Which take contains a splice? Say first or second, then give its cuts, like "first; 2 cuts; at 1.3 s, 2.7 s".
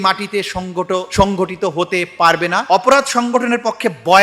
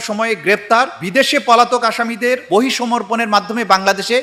first; 1 cut; at 2.6 s